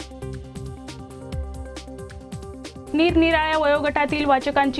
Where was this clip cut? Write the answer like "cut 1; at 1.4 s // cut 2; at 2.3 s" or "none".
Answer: cut 1; at 2.9 s